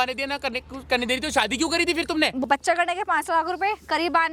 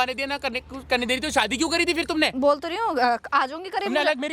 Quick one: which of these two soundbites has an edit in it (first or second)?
first